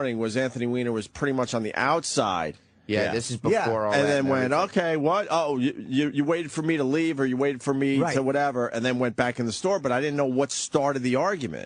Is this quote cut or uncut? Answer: cut